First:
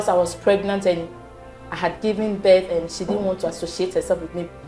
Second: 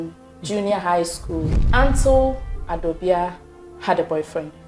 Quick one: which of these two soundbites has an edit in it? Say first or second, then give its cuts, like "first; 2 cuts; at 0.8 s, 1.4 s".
second; 1 cut; at 1.6 s